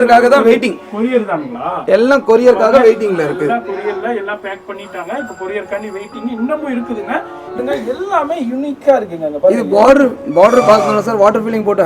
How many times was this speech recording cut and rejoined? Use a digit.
1